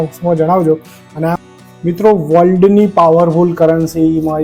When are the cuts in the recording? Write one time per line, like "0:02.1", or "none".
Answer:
0:01.4